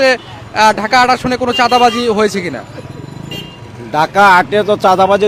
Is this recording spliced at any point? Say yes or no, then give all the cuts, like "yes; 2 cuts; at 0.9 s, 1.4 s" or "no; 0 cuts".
no; 0 cuts